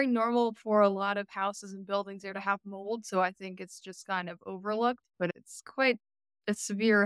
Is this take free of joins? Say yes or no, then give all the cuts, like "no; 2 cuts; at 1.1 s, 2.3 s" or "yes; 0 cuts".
no; 1 cut; at 5.3 s